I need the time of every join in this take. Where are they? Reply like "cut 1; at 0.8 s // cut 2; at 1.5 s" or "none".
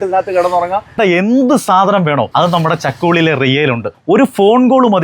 cut 1; at 1.0 s // cut 2; at 2.3 s // cut 3; at 3.9 s